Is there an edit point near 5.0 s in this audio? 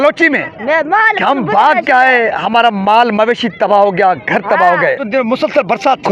yes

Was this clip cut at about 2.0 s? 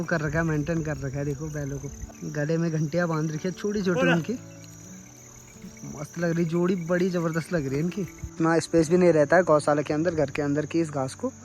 yes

